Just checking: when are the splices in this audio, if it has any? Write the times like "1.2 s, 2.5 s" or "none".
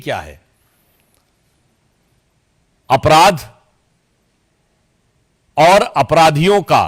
none